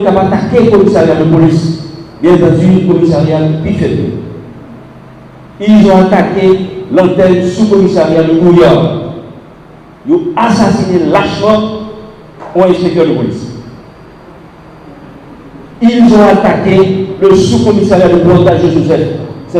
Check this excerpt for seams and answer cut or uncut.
uncut